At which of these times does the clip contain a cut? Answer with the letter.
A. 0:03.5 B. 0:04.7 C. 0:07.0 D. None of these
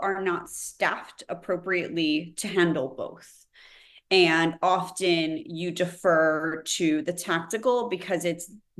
D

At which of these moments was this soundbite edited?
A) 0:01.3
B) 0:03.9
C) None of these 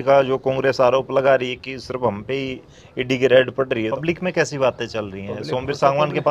B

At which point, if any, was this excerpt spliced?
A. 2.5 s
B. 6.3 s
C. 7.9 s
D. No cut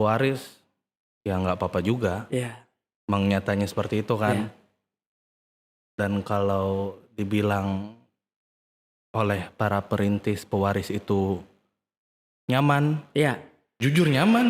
D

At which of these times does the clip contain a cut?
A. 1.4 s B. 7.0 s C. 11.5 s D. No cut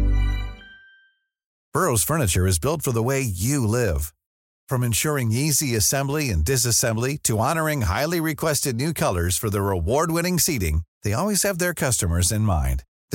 A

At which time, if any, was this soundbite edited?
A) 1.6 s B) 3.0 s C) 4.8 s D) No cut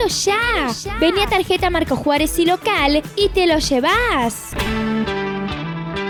D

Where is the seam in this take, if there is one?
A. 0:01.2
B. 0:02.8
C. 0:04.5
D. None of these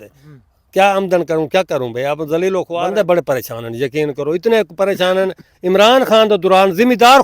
B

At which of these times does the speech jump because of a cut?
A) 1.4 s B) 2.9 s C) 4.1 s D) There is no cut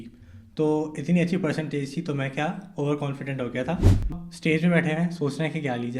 C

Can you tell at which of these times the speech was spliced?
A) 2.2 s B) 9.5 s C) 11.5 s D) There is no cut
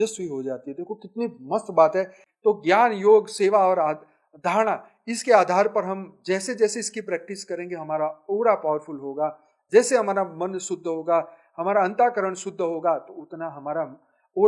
A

